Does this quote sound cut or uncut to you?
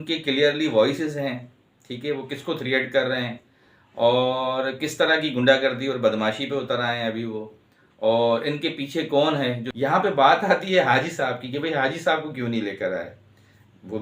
cut